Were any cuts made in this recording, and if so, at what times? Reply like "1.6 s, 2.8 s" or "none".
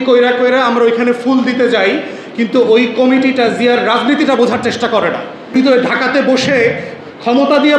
5.5 s